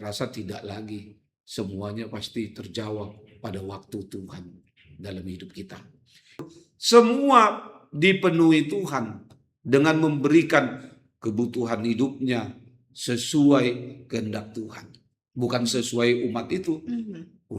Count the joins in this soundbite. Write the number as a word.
one